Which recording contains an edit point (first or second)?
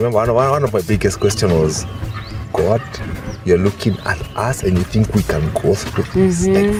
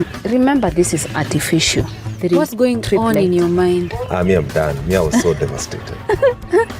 second